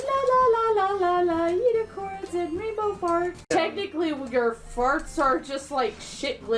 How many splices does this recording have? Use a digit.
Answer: 1